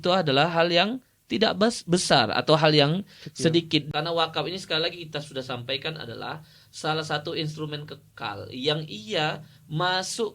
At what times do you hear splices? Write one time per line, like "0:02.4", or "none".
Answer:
0:03.9